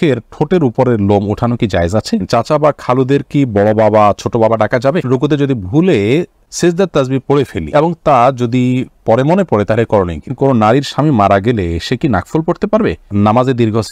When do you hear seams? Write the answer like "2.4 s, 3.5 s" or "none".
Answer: 2.2 s, 5.0 s, 6.4 s, 7.6 s, 10.3 s, 13.1 s